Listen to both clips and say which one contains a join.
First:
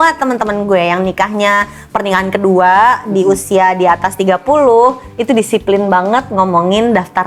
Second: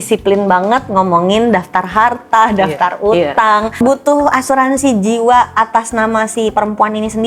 second; 1 cut; at 3.8 s

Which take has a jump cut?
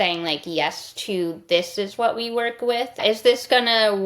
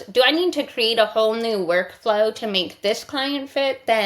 first; 1 cut; at 2.9 s

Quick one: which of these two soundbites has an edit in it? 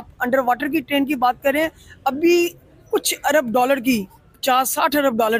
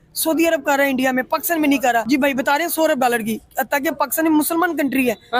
second; 1 cut; at 2.0 s

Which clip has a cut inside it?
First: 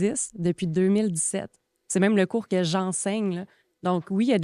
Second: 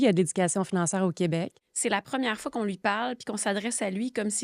second; 1 cut; at 1.6 s

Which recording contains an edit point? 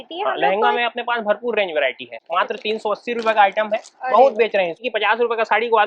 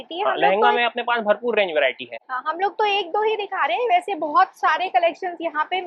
first; 2 cuts; at 2.2 s, 4.8 s

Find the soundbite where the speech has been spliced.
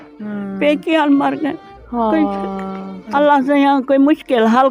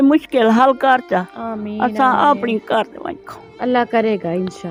first; 1 cut; at 3.0 s

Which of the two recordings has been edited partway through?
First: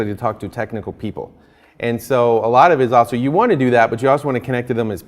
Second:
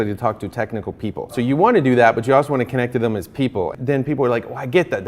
second; 2 cuts; at 1.4 s, 3.7 s

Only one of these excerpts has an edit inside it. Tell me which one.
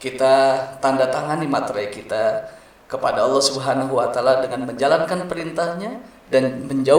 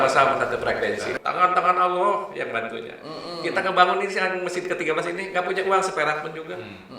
second; 1 cut; at 1.2 s

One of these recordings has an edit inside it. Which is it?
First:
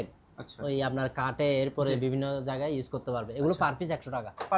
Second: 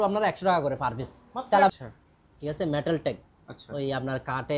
second; 1 cut; at 1.7 s

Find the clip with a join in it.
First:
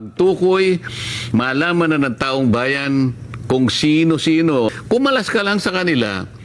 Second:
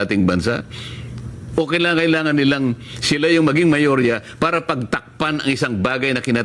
first; 1 cut; at 4.7 s

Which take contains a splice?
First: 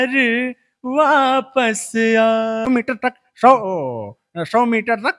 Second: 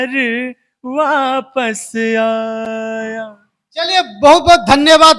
first; 1 cut; at 2.7 s

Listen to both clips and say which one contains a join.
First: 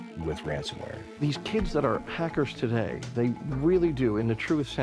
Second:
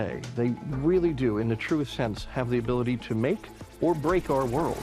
first; 1 cut; at 1.3 s

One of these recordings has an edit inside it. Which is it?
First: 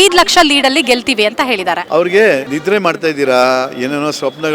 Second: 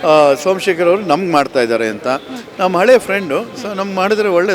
first; 2 cuts; at 1.8 s, 2.5 s

